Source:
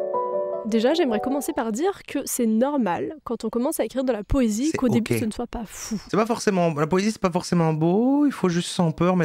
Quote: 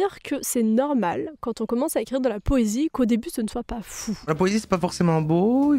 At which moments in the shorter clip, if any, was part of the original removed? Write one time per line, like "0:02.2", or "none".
0:04.2